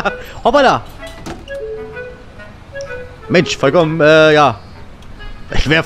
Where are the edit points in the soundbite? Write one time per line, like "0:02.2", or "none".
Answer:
none